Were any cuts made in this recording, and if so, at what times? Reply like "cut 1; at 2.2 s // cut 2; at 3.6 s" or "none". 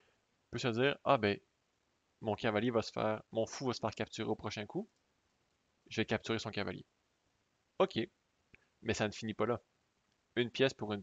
none